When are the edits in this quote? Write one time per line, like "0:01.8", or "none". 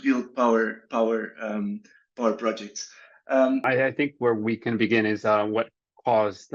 0:03.6